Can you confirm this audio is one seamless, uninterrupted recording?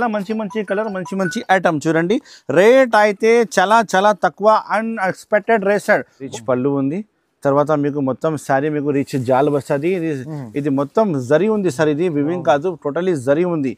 no; 1 cut; at 6.2 s

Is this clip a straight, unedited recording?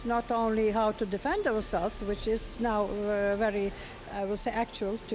yes; 0 cuts

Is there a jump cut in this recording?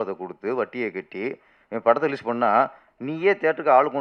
no; 0 cuts

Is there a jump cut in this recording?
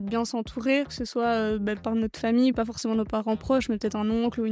yes; 2 cuts; at 1.8 s, 2.6 s

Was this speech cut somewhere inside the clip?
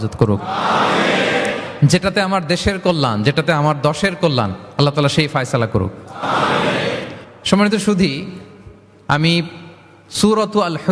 no; 0 cuts

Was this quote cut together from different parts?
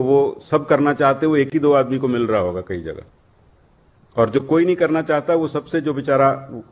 no; 0 cuts

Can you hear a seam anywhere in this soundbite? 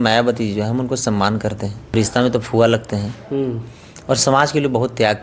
yes; 1 cut; at 1.9 s

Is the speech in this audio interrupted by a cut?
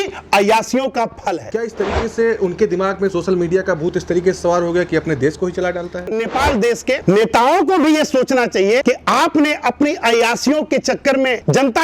yes; 2 cuts; at 1.4 s, 6.1 s

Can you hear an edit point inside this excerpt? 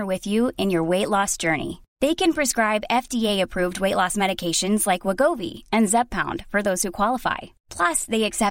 no; 0 cuts

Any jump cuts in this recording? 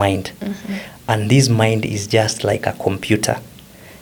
no; 0 cuts

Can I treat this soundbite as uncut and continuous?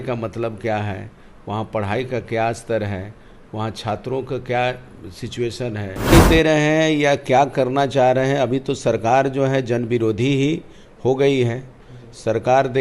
no; 1 cut; at 6.1 s

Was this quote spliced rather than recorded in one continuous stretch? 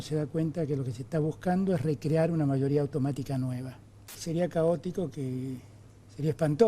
yes; 1 cut; at 4.2 s

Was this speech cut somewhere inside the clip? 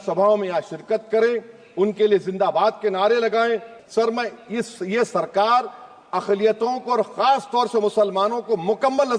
yes; 1 cut; at 3.7 s

